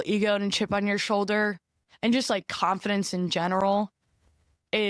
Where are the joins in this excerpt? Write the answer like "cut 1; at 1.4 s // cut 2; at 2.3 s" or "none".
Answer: none